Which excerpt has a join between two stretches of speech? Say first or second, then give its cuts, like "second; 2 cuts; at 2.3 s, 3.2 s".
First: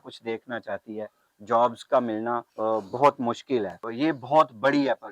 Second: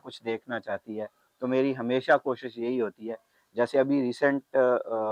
first; 3 cuts; at 1.2 s, 2.5 s, 3.8 s